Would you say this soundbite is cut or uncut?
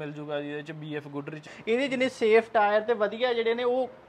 cut